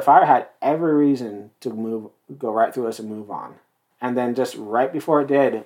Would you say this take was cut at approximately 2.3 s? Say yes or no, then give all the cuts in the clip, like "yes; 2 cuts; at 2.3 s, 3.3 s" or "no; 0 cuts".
no; 1 cut; at 3.9 s